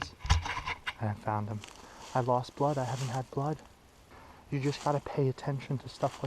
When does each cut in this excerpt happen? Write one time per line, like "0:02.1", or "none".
0:01.9
0:04.2